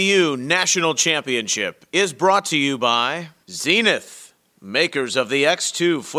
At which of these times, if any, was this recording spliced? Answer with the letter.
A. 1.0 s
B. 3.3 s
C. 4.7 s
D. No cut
B